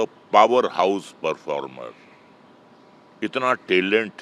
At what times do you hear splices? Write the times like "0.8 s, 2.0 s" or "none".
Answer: none